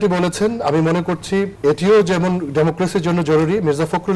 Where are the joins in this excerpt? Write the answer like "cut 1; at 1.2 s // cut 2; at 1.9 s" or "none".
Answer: cut 1; at 1.5 s